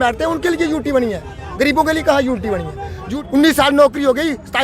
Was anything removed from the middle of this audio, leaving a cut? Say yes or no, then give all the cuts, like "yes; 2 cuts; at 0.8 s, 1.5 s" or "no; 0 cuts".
yes; 1 cut; at 3.0 s